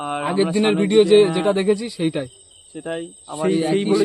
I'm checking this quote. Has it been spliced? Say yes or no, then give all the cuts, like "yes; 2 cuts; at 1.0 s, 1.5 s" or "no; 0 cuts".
no; 0 cuts